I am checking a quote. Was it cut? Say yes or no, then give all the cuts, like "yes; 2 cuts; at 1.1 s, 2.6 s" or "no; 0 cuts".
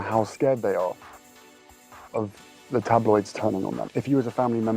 yes; 1 cut; at 3.9 s